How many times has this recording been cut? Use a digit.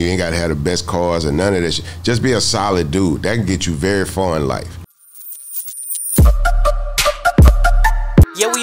1